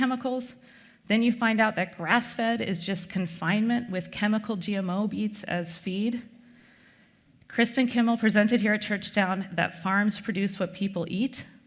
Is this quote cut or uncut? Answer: uncut